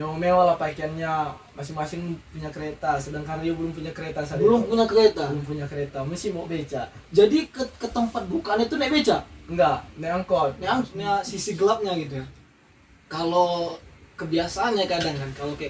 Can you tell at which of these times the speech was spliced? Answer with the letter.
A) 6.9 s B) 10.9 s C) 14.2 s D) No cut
B